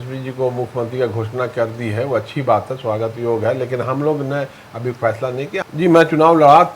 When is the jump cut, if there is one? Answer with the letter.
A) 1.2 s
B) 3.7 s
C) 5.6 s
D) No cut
C